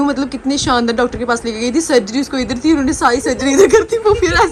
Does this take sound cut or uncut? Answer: uncut